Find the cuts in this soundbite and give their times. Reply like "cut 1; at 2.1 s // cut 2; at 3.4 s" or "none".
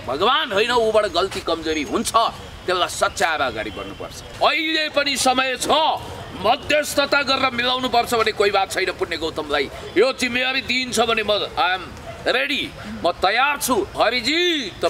cut 1; at 4.3 s // cut 2; at 13.9 s